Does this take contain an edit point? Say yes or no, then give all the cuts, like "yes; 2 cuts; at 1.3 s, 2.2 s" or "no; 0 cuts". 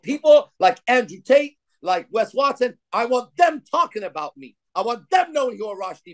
no; 0 cuts